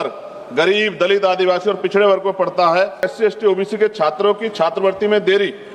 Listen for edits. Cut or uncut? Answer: cut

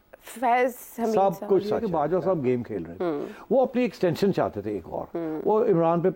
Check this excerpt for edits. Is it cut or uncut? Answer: cut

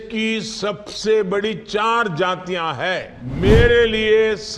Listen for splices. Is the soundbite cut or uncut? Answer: cut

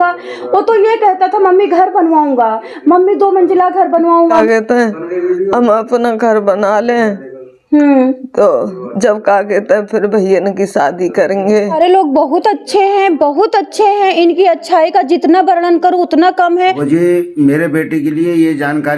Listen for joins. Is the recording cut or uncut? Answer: cut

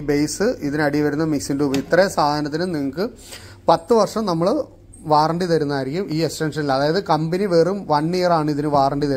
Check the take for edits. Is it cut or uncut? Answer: uncut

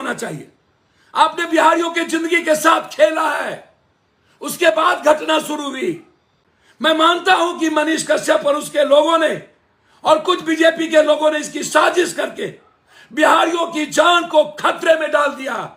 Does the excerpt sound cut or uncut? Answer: uncut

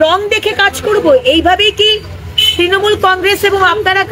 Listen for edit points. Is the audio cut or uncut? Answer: uncut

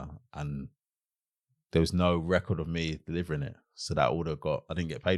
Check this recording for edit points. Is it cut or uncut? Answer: uncut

